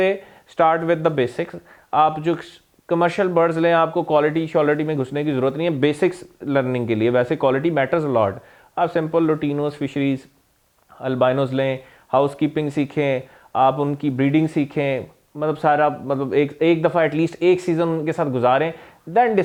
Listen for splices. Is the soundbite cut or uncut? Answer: uncut